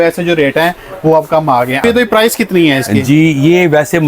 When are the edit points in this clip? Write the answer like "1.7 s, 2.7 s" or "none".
1.7 s